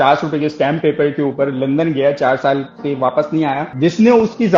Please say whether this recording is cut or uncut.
cut